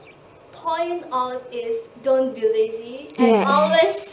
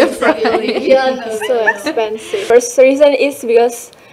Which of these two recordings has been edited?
second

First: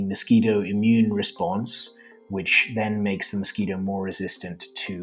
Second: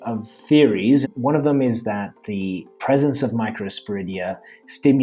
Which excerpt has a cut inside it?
second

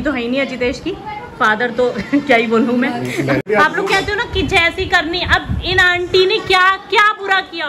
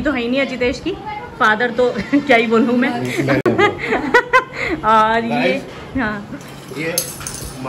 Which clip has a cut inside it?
first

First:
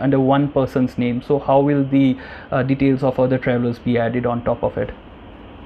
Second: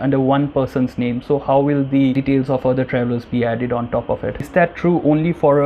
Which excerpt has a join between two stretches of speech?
second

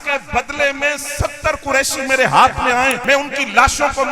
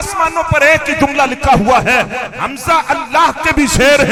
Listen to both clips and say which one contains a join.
first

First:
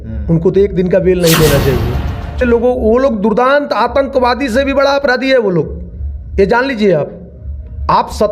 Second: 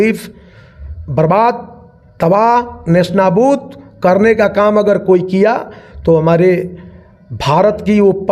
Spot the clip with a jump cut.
first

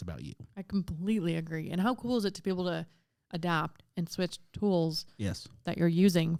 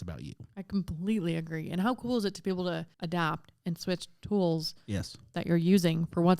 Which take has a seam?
second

